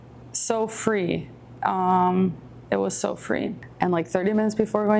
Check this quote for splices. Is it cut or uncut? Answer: cut